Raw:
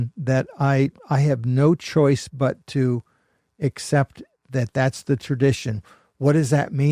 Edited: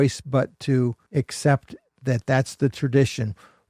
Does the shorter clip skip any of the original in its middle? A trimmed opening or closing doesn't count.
yes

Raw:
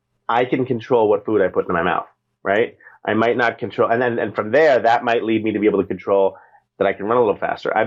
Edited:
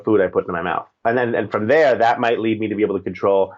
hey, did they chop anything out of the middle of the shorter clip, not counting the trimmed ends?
yes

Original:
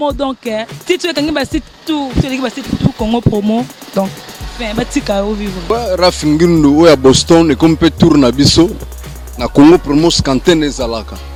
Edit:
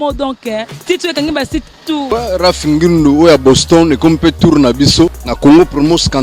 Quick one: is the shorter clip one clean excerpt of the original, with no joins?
no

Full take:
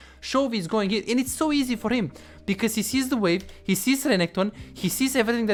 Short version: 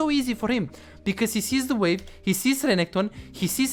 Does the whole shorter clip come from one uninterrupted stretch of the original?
yes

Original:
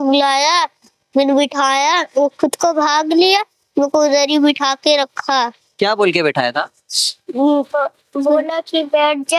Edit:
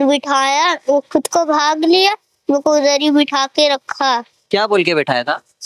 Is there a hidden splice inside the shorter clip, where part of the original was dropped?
no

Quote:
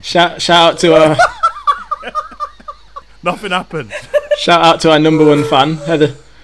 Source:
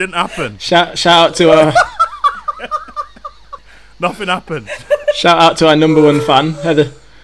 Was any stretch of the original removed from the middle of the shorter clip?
yes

